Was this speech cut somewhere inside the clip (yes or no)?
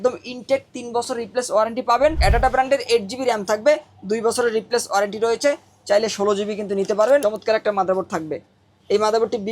yes